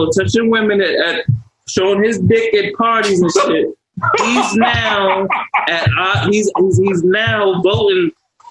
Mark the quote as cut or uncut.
uncut